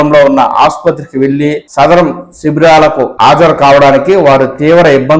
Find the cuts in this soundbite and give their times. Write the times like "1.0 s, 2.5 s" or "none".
1.6 s, 3.1 s

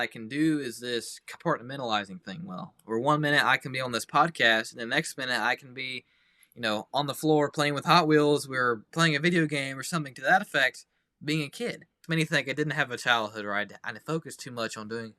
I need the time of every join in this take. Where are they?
12.0 s

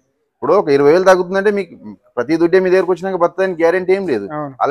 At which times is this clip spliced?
none

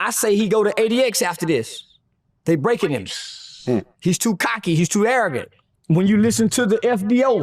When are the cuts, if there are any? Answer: 5.4 s

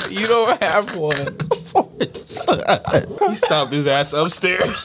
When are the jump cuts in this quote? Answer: 3.1 s

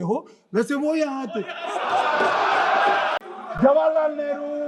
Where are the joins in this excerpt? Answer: 3.2 s

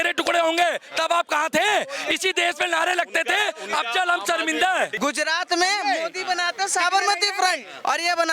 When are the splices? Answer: 4.9 s

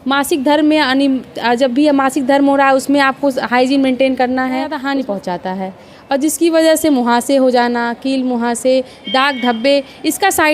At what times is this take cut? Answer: 4.8 s

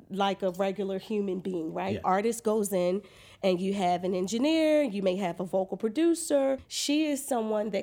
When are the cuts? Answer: 2.0 s, 6.7 s

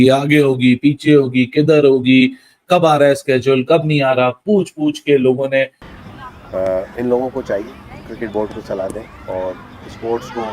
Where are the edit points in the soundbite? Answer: 5.8 s

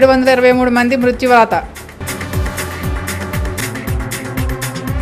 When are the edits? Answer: none

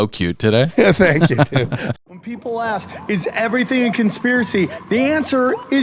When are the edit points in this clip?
1.8 s

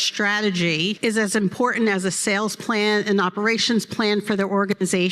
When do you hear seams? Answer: 1.0 s

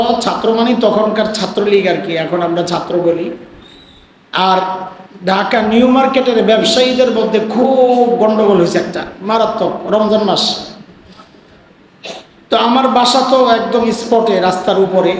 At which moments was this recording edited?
none

